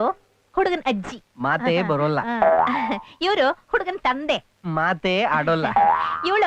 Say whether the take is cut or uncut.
uncut